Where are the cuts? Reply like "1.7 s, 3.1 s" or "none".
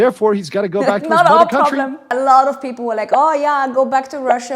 2.0 s